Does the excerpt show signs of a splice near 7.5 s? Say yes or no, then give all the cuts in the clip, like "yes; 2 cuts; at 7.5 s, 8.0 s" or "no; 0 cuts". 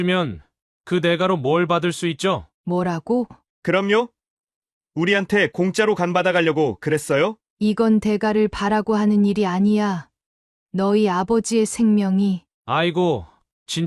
yes; 3 cuts; at 2.5 s, 3.4 s, 7.5 s